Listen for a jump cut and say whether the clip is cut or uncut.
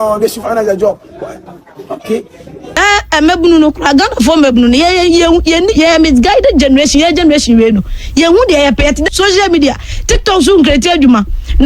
cut